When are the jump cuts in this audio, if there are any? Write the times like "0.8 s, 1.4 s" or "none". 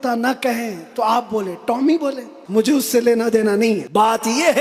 2.3 s, 3.8 s